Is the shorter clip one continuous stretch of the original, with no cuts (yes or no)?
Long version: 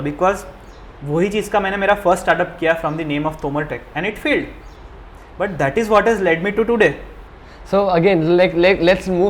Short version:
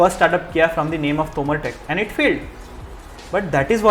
yes